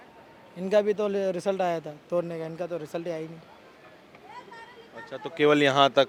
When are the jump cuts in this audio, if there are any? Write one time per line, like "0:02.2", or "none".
none